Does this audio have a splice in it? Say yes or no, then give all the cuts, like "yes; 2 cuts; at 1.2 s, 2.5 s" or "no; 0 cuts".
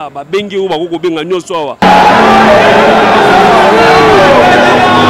no; 0 cuts